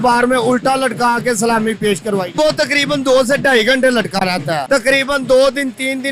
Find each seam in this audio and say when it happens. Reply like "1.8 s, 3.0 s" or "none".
2.3 s, 4.6 s